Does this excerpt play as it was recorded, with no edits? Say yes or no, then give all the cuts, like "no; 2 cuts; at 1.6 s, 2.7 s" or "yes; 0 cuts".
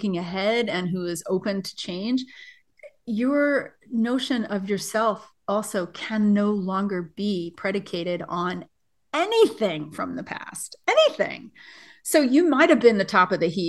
yes; 0 cuts